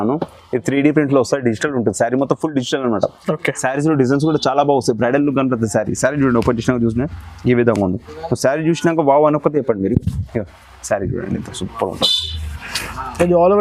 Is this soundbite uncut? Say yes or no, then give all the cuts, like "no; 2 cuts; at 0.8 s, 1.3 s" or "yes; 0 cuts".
yes; 0 cuts